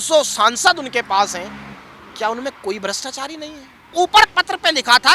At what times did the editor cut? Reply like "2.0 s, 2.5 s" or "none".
3.9 s